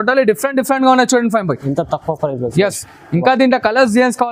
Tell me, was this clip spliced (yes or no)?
no